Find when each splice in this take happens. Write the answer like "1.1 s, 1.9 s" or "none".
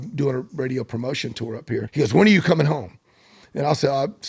1.9 s